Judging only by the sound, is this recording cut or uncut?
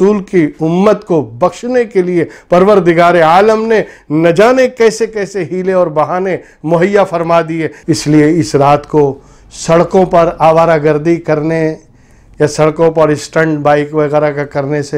cut